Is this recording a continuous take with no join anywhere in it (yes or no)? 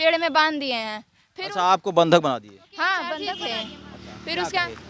no